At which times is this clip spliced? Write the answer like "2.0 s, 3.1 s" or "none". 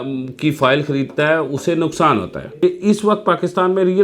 2.4 s